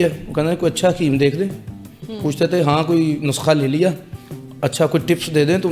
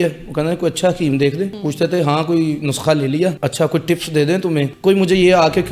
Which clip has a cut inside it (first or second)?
second